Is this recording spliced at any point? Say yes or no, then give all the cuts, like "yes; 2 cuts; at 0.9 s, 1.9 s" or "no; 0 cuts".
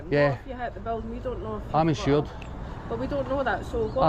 no; 0 cuts